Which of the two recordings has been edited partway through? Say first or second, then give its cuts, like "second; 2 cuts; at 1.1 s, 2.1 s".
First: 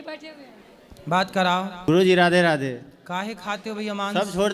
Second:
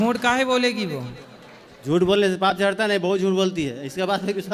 first; 1 cut; at 1.9 s